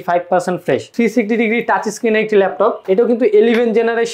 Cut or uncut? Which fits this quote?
cut